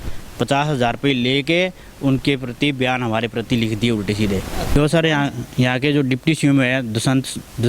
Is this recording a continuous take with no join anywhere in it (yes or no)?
no